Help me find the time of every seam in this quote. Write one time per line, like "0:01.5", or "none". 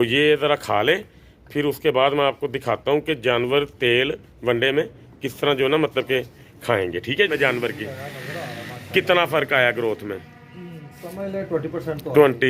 0:07.3